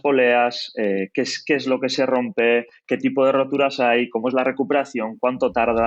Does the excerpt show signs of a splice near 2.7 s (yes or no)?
no